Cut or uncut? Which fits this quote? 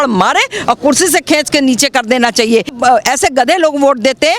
cut